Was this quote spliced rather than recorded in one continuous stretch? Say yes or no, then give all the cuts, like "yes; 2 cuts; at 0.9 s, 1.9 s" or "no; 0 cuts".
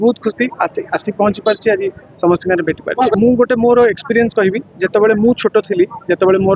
no; 0 cuts